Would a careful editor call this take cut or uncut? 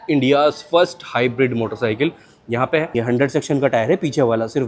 cut